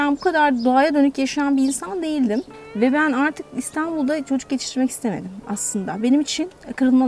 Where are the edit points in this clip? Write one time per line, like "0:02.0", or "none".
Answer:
0:02.5